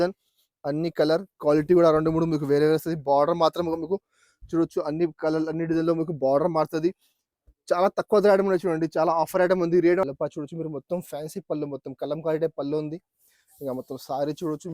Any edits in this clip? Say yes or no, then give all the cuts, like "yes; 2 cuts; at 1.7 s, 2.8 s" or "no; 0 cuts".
yes; 1 cut; at 10.0 s